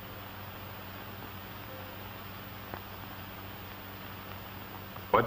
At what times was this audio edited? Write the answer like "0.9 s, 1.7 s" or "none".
2.4 s